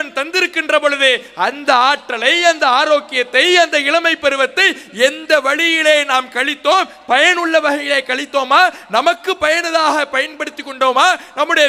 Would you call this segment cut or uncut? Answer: uncut